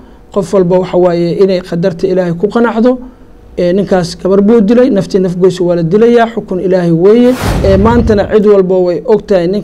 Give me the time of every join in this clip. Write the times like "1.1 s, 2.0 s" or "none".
7.5 s